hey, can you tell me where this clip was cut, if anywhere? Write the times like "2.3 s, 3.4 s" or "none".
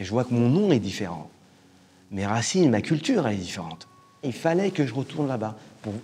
4.3 s